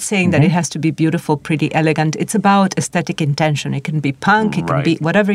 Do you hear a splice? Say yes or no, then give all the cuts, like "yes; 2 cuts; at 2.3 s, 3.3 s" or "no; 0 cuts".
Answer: no; 0 cuts